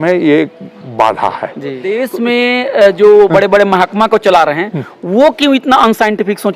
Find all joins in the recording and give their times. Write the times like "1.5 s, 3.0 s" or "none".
2.0 s, 3.3 s